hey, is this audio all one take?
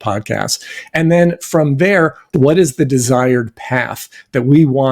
no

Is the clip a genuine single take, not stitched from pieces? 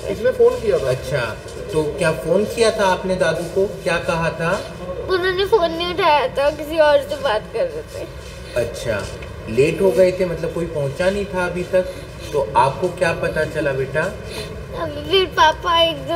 yes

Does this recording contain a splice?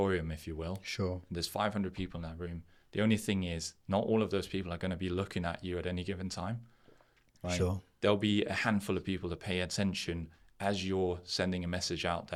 no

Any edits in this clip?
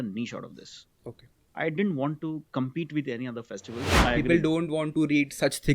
yes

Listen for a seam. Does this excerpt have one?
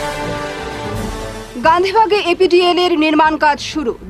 yes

